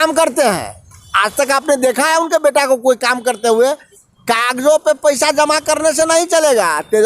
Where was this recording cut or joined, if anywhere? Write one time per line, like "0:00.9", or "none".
0:03.9